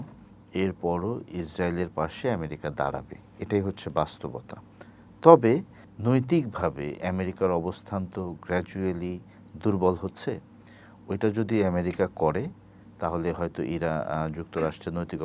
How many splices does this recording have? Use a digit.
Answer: 0